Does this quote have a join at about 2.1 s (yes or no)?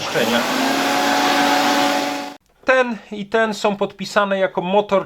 yes